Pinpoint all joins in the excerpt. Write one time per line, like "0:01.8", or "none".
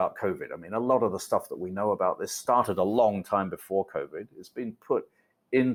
none